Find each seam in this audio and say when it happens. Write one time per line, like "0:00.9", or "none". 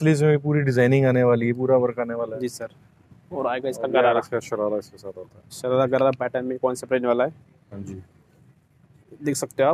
none